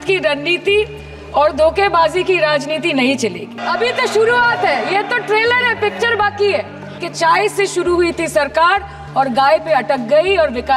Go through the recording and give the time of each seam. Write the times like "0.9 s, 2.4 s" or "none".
3.6 s, 7.0 s